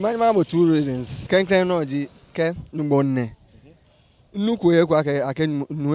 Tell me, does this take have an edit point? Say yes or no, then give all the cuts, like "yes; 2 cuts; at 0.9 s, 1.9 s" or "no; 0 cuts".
yes; 1 cut; at 2.3 s